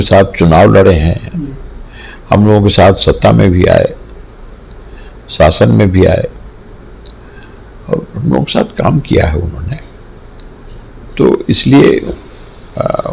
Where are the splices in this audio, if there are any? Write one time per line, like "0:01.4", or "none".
none